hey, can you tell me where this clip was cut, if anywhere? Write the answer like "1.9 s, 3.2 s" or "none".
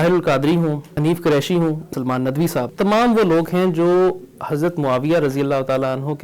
0.9 s, 2.2 s